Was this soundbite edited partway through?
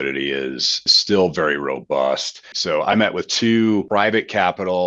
yes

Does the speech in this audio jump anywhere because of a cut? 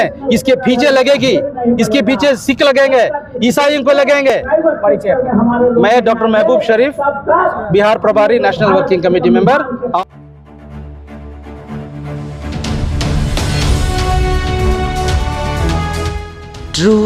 no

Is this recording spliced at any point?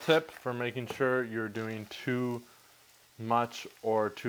no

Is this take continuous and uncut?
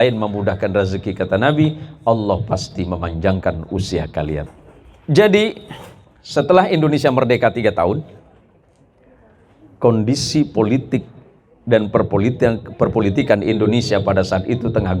no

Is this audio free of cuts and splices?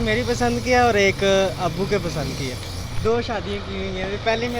yes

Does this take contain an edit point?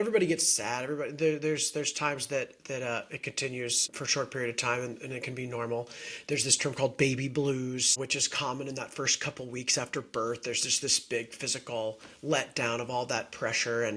yes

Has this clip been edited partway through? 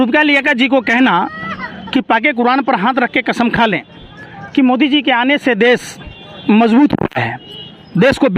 no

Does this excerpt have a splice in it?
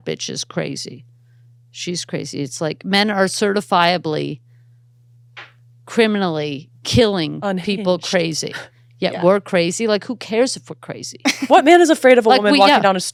no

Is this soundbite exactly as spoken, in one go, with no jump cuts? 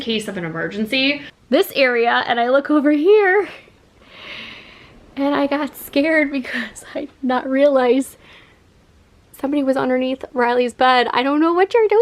no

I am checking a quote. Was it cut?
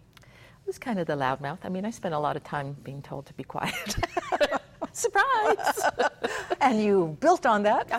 no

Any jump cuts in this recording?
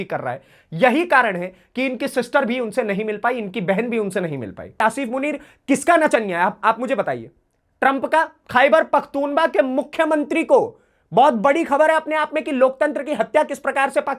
yes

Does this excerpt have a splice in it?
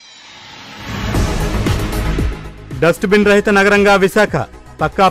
no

